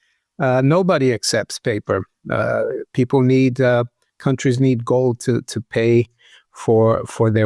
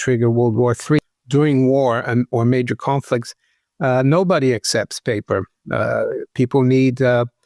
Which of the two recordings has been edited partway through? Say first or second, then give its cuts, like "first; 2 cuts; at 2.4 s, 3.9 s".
second; 1 cut; at 1.0 s